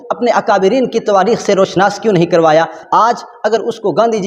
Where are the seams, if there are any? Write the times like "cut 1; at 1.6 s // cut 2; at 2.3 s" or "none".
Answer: cut 1; at 2.8 s

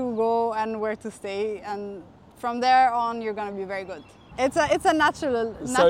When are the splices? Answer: cut 1; at 4.3 s

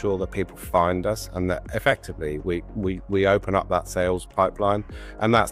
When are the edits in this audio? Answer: none

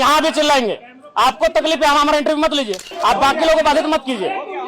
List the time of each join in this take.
cut 1; at 2.9 s

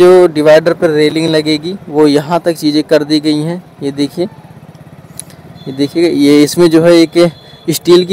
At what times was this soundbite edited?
none

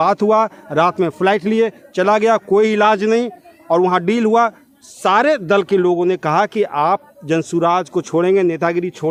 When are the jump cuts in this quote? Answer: none

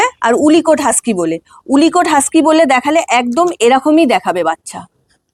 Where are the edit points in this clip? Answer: none

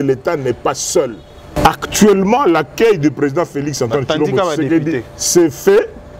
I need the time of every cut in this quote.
cut 1; at 1.6 s

